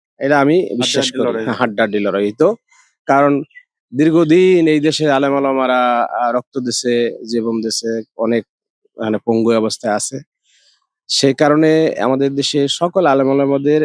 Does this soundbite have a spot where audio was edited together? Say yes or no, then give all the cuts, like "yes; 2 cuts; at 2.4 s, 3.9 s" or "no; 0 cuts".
no; 0 cuts